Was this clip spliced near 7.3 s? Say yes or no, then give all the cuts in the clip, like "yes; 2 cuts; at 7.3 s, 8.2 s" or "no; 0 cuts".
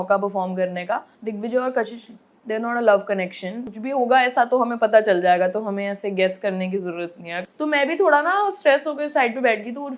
yes; 3 cuts; at 1.2 s, 3.6 s, 7.3 s